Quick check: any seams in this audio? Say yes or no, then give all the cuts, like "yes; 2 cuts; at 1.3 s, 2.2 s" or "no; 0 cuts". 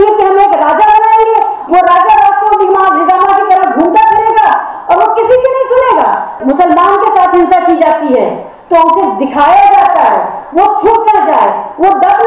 yes; 1 cut; at 6.4 s